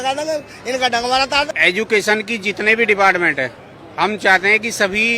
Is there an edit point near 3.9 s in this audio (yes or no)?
no